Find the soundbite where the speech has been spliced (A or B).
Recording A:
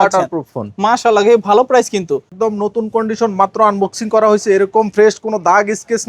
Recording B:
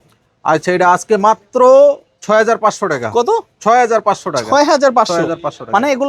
A